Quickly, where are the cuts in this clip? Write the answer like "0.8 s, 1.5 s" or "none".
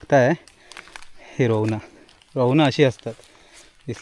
none

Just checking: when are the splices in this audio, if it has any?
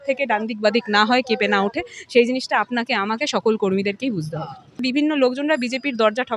4.8 s

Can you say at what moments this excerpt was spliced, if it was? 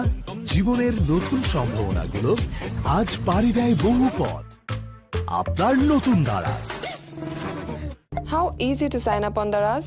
8.1 s

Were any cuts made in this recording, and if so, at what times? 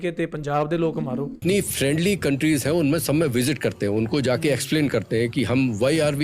1.4 s

